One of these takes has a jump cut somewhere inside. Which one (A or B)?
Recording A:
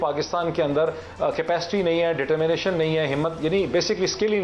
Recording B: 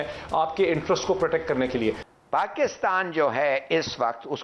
B